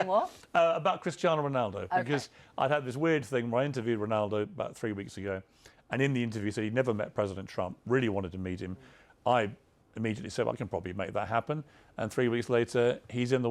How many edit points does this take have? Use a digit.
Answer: 0